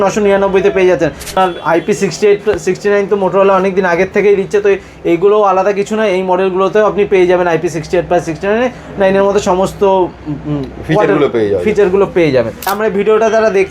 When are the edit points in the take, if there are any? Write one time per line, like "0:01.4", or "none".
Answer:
0:01.3
0:12.7